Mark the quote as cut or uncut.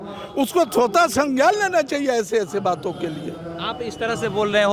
uncut